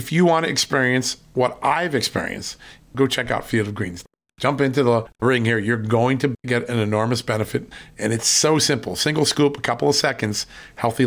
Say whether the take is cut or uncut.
uncut